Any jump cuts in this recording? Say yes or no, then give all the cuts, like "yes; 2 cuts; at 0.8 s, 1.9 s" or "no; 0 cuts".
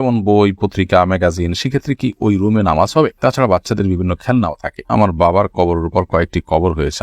yes; 1 cut; at 4.9 s